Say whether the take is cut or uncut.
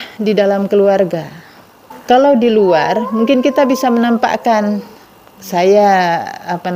cut